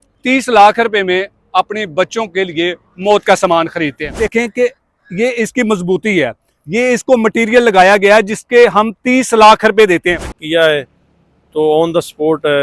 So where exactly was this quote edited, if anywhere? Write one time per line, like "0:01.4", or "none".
0:04.3
0:10.4